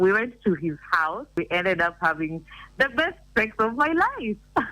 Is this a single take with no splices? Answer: no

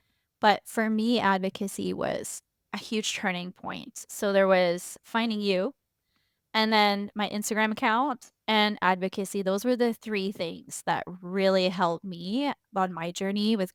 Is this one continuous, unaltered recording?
yes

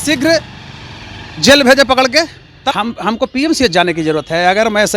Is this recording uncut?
no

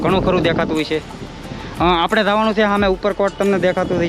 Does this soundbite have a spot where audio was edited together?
no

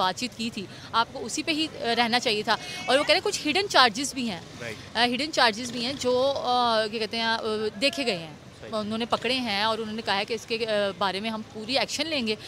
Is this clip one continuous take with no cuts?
yes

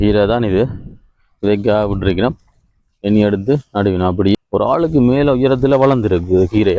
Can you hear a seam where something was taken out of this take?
yes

